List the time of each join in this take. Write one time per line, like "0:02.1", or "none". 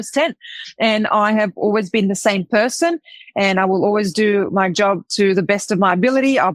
none